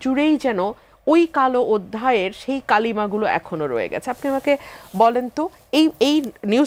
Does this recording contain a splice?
no; 0 cuts

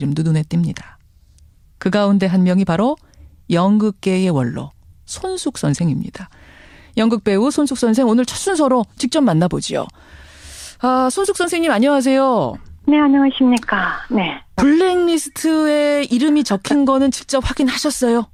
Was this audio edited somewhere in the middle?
no; 0 cuts

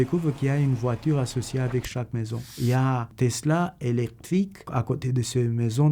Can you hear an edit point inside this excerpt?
yes; 1 cut; at 4.7 s

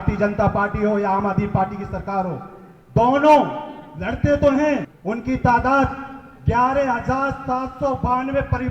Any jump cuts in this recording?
yes; 1 cut; at 4.9 s

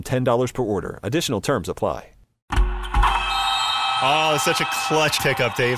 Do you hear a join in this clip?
yes; 1 cut; at 2.5 s

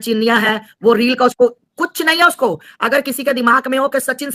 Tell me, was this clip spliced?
no; 0 cuts

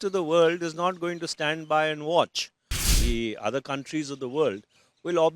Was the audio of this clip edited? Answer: yes; 1 cut; at 2.8 s

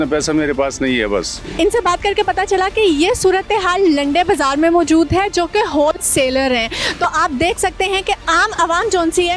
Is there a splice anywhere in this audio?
no; 0 cuts

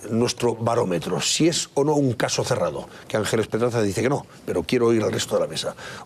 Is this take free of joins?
no; 1 cut; at 1.9 s

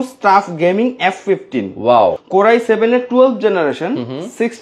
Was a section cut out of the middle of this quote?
no; 0 cuts

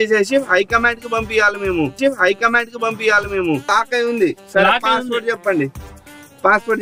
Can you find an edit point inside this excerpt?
yes; 1 cut; at 3.7 s

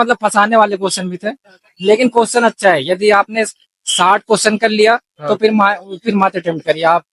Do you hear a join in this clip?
no; 0 cuts

